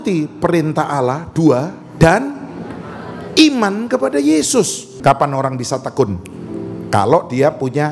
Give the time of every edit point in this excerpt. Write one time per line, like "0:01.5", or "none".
0:04.8